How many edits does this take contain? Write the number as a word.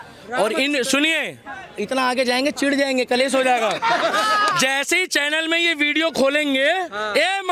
zero